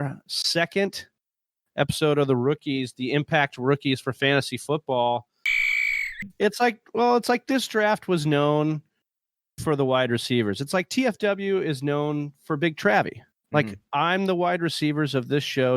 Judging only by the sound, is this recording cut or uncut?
cut